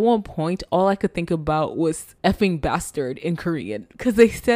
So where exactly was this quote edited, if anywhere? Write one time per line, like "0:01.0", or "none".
0:02.1